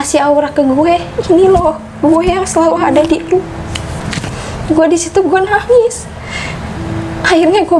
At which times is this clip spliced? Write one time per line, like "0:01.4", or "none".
0:04.0

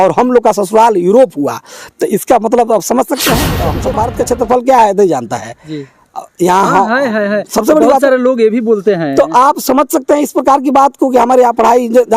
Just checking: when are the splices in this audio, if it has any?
0:03.8

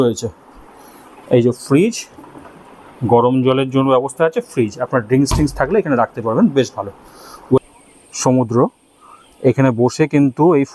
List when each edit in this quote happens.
0:07.6

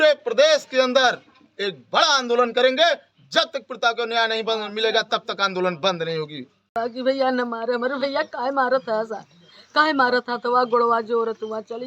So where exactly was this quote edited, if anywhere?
0:06.7

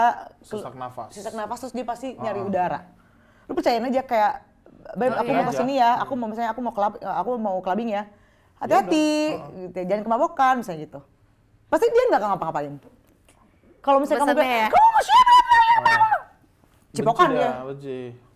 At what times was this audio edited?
none

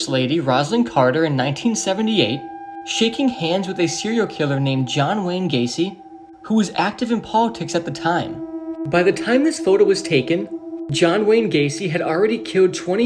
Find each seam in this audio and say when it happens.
none

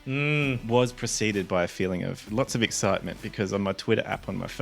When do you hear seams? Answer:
0:02.2

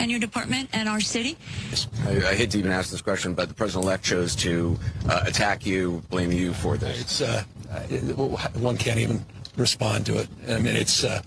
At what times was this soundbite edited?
0:01.9

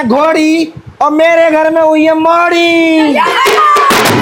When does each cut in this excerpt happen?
none

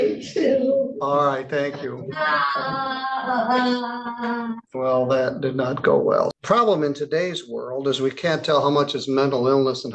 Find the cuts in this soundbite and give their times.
0:04.6
0:06.3

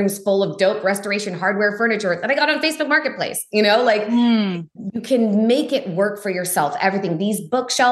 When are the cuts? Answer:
none

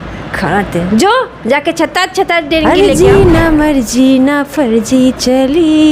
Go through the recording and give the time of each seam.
0:02.7

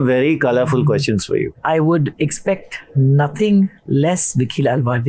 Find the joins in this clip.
0:01.5

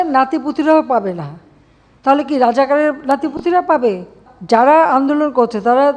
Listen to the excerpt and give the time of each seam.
0:04.3

